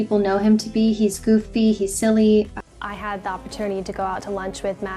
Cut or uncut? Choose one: cut